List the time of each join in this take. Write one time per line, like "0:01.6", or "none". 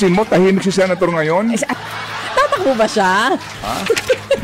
0:01.7